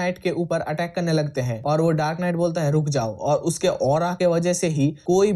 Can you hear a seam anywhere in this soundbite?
no; 0 cuts

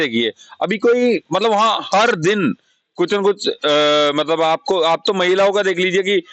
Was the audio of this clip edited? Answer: no; 0 cuts

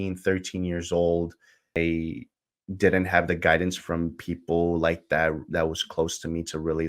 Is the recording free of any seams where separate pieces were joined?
no; 1 cut; at 1.8 s

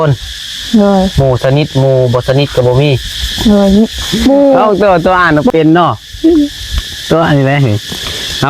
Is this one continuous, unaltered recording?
no; 1 cut; at 4.6 s

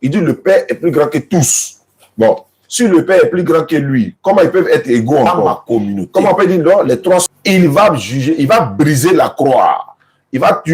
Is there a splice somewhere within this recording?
yes; 1 cut; at 7.2 s

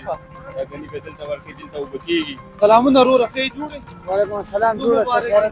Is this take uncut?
no; 1 cut; at 2.4 s

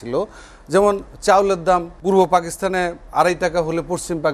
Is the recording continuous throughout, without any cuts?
no; 2 cuts; at 1.9 s, 3.0 s

